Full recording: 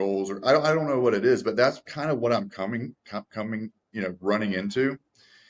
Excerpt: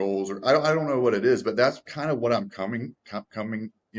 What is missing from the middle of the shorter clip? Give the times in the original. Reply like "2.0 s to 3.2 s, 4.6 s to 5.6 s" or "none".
none